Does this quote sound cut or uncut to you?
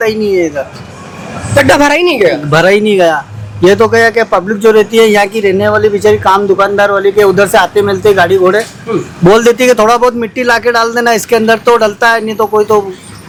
uncut